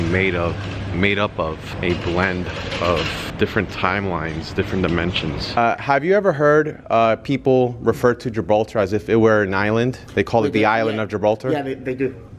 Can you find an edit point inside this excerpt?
yes; 3 cuts; at 1.7 s, 3.3 s, 5.6 s

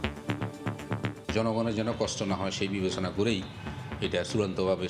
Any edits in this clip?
yes; 1 cut; at 1.2 s

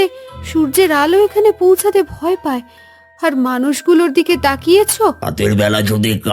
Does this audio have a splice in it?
yes; 1 cut; at 5.2 s

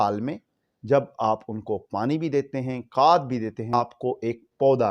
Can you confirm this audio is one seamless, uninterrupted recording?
no; 1 cut; at 3.7 s

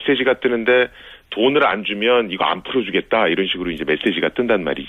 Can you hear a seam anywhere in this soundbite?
yes; 1 cut; at 1.9 s

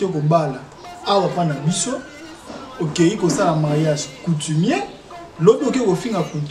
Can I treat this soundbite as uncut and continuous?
yes; 0 cuts

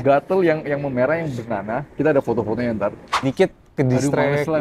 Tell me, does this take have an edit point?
yes; 1 cut; at 3.2 s

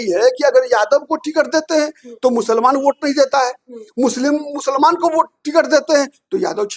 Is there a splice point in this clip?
no; 0 cuts

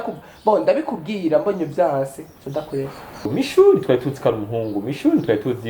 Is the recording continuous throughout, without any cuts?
no; 1 cut; at 3.3 s

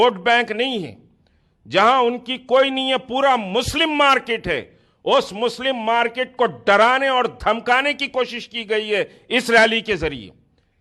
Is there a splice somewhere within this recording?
no; 0 cuts

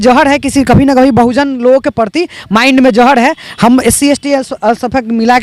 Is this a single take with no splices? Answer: yes; 0 cuts

